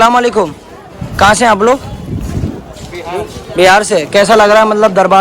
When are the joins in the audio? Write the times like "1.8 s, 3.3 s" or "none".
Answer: none